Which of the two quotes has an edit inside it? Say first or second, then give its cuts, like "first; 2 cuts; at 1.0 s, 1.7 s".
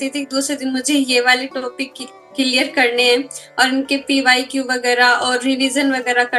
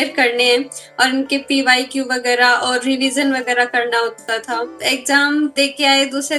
second; 2 cuts; at 4.8 s, 5.5 s